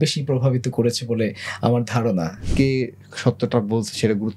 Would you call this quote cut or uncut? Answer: cut